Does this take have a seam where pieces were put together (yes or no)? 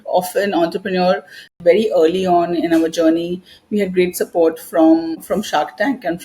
yes